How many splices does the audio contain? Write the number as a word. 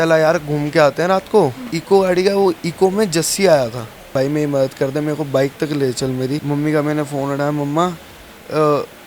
three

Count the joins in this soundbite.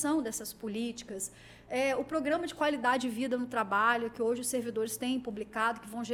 zero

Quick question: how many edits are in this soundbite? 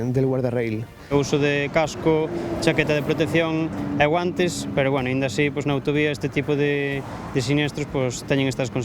one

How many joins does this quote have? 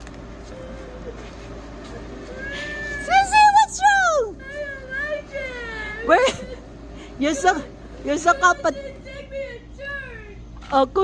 zero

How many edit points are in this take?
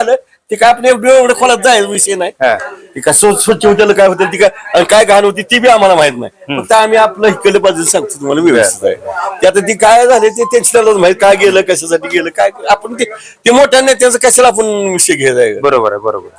zero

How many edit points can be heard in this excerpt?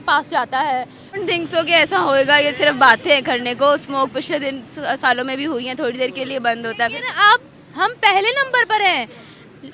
one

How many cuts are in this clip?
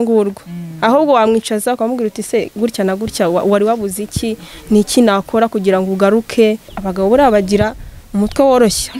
one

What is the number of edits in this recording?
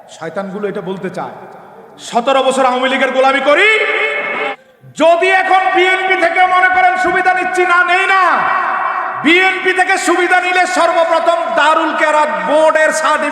one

